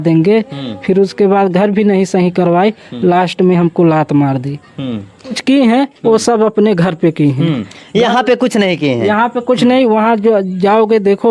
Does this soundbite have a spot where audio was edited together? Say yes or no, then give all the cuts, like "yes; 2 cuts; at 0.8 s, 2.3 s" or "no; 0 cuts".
no; 0 cuts